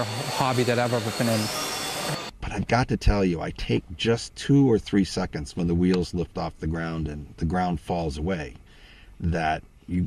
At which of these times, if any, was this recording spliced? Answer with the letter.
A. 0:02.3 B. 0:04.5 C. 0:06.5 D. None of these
A